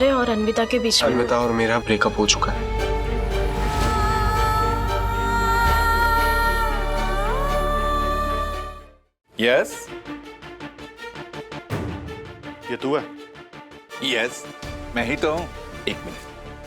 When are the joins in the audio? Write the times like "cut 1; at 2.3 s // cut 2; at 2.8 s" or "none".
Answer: cut 1; at 2.6 s // cut 2; at 8.6 s // cut 3; at 9.8 s